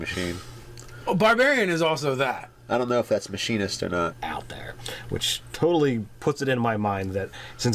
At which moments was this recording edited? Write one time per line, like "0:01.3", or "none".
none